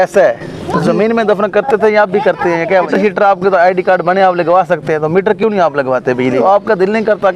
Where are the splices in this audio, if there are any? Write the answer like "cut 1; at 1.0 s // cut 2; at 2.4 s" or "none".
cut 1; at 2.9 s // cut 2; at 6.3 s